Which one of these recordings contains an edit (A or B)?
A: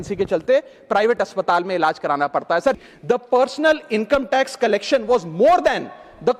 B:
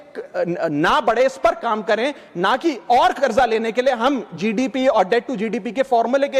A